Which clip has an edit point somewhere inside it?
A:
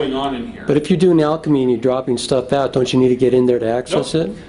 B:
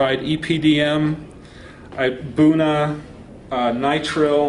A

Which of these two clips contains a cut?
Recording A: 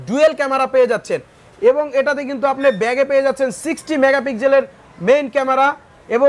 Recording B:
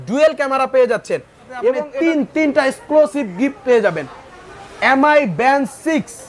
B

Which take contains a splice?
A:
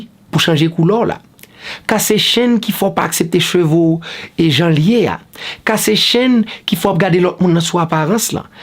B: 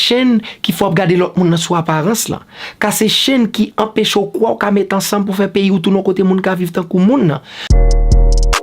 B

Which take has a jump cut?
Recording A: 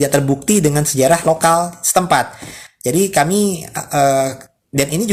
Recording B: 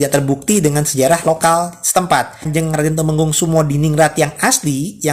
B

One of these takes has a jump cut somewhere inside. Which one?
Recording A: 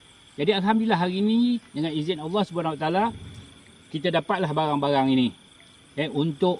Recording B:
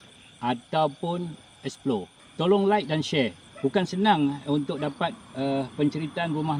B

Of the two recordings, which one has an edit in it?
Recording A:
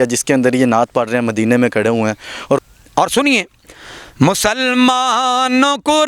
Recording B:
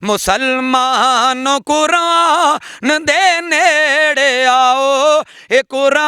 A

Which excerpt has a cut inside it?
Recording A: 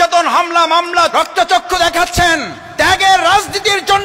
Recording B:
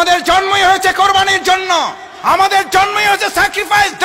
A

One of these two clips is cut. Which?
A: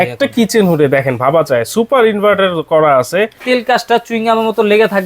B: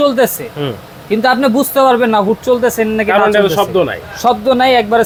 A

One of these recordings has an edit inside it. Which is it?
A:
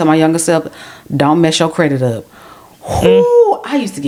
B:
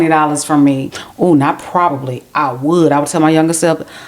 B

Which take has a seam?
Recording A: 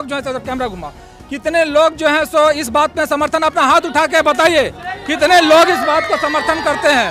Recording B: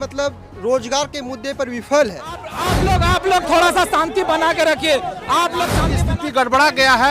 B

